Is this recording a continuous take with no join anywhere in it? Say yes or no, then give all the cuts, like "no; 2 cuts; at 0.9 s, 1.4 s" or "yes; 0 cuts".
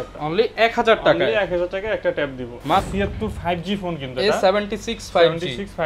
no; 1 cut; at 2.9 s